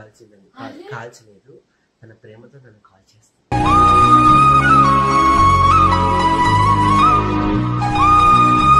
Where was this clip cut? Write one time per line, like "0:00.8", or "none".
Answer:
none